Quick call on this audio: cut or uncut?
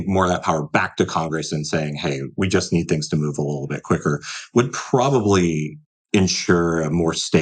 uncut